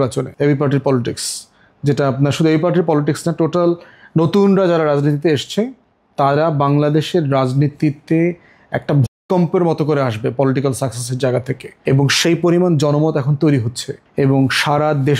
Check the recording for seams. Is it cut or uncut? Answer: uncut